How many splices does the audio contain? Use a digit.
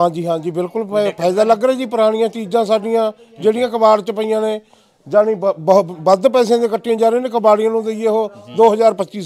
0